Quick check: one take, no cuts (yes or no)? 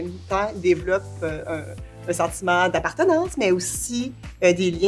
yes